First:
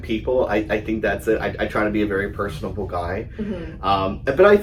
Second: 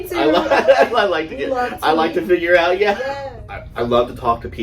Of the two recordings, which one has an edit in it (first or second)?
second